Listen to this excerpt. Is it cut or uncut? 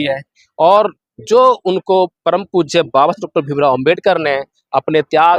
uncut